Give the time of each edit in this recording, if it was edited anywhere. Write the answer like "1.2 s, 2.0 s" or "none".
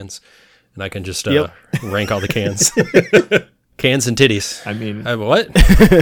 3.6 s